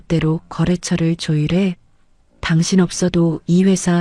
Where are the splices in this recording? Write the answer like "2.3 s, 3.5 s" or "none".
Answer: none